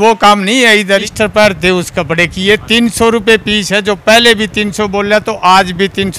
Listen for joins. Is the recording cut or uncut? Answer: cut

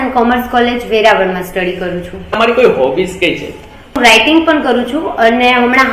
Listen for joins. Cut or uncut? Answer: cut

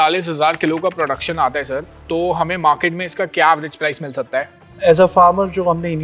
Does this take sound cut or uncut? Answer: uncut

